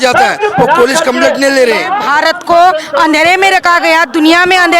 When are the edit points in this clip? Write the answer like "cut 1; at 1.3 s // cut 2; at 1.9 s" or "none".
cut 1; at 2.0 s